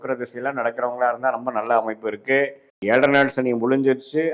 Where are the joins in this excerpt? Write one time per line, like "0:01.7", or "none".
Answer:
0:02.7